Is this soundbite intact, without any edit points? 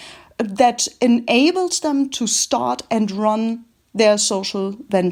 yes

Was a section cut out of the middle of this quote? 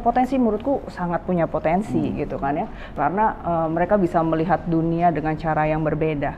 no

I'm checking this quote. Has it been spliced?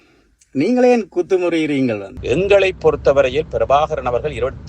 yes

